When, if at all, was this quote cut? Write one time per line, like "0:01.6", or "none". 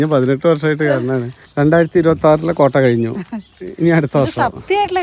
0:01.4